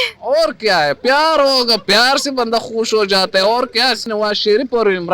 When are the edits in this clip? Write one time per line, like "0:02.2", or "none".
0:04.1